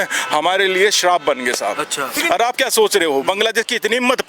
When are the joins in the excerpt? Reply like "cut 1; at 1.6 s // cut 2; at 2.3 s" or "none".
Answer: cut 1; at 2.2 s